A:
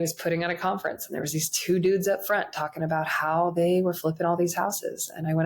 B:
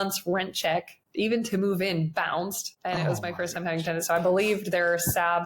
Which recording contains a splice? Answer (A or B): B